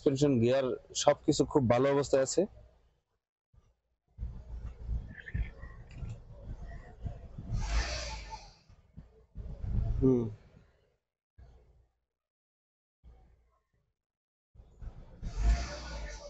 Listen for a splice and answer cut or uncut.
uncut